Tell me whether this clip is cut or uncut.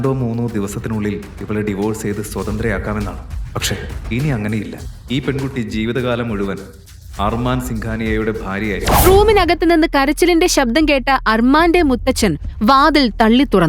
cut